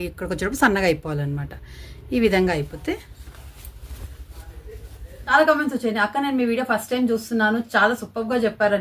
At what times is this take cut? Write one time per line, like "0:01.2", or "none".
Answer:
0:05.1